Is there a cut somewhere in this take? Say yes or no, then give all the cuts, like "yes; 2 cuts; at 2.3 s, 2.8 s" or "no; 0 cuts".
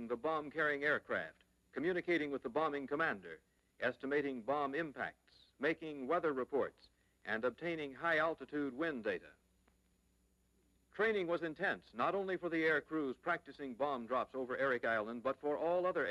yes; 1 cut; at 3.4 s